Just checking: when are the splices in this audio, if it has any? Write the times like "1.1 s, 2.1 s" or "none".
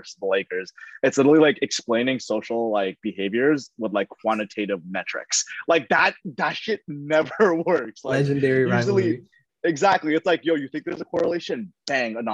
none